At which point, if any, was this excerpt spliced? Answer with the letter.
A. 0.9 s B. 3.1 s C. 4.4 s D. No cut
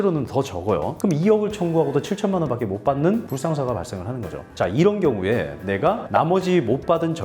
A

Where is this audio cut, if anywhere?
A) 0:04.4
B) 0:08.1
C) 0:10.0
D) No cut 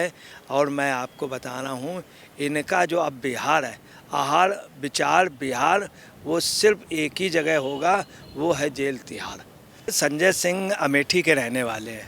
C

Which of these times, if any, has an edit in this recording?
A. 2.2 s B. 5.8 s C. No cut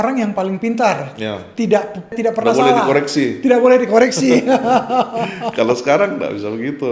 A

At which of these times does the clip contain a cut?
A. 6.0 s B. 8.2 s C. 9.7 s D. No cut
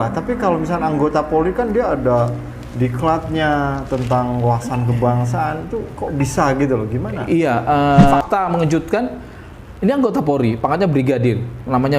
B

